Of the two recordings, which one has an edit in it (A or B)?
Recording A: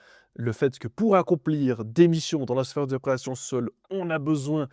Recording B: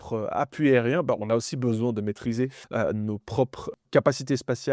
B